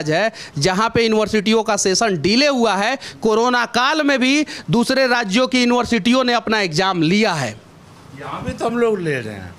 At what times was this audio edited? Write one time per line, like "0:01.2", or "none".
none